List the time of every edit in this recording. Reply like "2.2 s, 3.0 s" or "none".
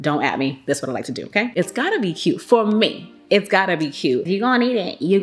1.5 s, 4.3 s

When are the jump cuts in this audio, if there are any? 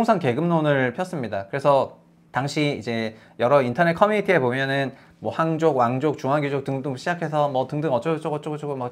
none

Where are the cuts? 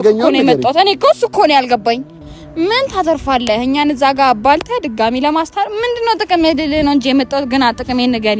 none

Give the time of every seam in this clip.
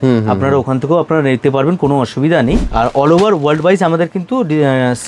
2.7 s

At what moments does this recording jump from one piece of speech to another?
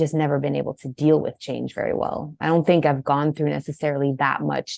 none

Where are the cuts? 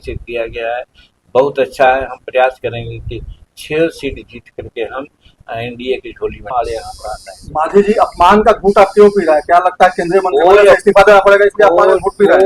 6.5 s

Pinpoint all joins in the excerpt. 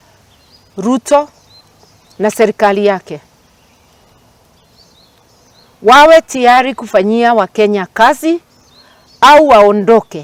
none

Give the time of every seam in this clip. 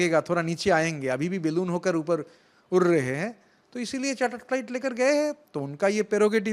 none

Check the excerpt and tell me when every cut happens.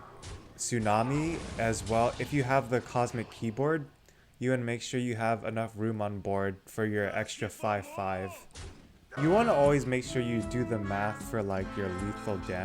9.0 s

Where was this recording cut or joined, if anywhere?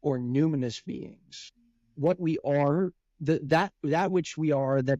1.4 s

